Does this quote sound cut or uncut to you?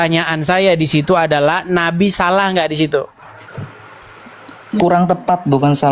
uncut